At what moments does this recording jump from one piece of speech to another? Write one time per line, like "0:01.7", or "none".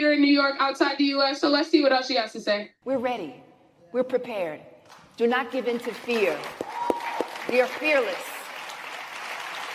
0:02.7